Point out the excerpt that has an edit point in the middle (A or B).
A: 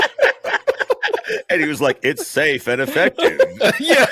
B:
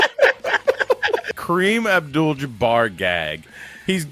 B